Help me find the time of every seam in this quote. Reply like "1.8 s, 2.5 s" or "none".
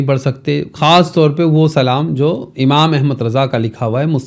none